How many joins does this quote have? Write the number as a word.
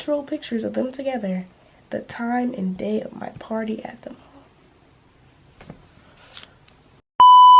zero